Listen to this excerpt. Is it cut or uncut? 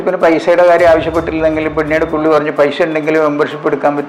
uncut